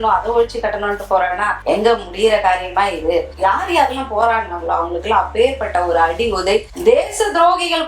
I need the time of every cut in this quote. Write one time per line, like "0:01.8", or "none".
0:03.3